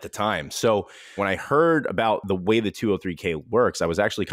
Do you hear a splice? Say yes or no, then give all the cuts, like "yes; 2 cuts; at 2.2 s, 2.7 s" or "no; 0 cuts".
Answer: yes; 1 cut; at 1.2 s